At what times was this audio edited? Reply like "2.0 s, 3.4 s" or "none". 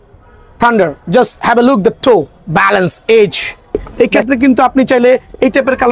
3.9 s